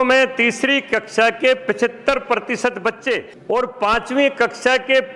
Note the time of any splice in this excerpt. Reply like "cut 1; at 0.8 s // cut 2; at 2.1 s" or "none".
cut 1; at 3.3 s